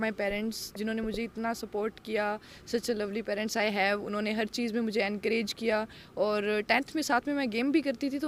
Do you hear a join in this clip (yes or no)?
no